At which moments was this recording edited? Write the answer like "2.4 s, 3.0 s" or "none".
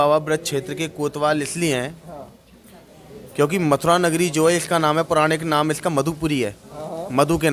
none